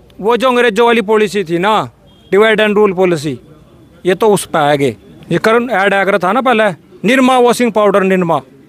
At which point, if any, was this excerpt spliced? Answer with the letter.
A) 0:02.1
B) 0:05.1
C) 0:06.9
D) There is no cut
B